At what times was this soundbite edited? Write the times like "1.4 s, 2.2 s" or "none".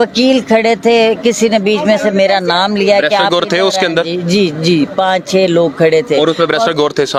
none